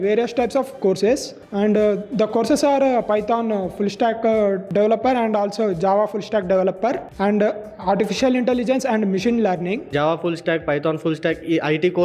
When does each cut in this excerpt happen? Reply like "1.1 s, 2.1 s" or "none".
1.4 s, 4.6 s, 7.1 s, 9.8 s